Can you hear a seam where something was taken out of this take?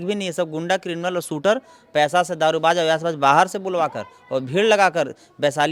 no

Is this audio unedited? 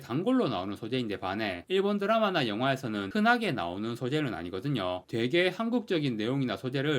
no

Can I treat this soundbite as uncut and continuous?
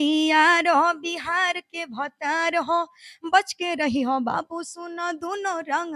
yes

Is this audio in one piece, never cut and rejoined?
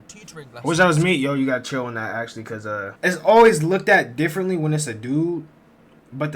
no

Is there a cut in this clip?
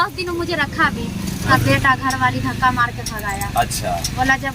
yes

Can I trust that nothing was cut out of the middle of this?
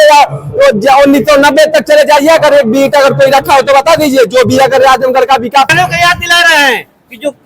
no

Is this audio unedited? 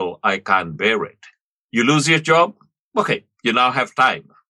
yes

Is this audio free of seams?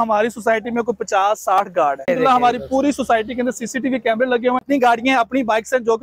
no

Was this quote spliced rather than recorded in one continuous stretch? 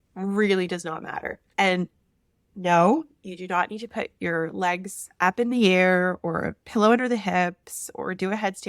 yes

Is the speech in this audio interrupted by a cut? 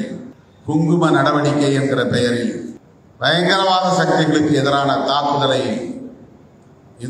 no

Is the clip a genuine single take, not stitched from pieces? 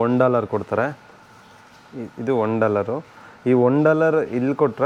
yes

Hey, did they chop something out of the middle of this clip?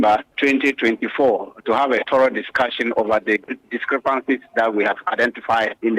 no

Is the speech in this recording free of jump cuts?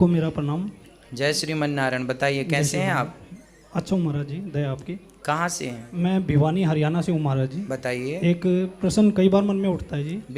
yes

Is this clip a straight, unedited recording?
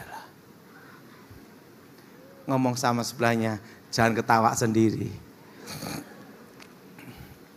yes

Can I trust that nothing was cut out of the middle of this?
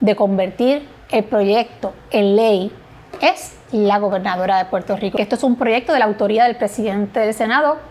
no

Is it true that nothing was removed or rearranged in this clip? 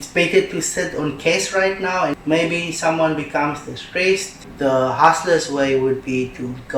no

